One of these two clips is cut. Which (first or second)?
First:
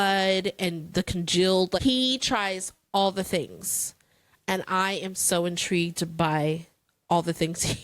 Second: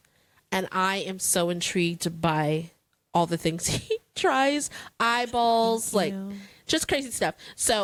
first